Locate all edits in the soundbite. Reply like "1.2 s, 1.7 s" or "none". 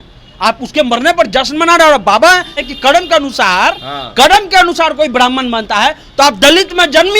2.7 s